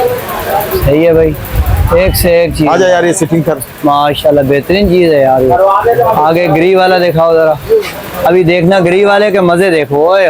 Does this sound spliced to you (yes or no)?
no